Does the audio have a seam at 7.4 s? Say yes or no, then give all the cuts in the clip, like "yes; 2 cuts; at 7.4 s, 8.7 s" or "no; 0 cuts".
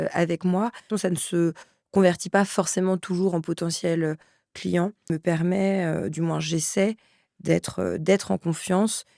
no; 2 cuts; at 0.9 s, 5.1 s